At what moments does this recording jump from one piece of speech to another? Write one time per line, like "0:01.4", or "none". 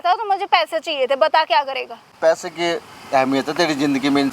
0:02.1